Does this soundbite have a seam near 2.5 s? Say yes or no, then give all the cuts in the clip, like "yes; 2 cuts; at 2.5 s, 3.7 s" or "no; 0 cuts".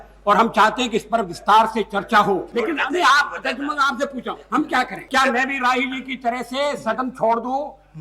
yes; 2 cuts; at 2.5 s, 5.1 s